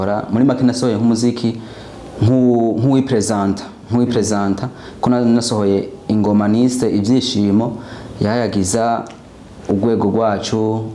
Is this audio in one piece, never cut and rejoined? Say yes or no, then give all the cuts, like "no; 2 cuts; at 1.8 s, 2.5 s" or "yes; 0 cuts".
yes; 0 cuts